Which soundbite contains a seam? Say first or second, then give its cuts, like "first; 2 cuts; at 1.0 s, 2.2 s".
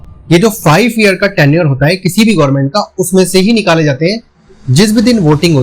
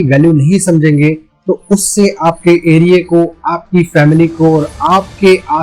first; 1 cut; at 4.3 s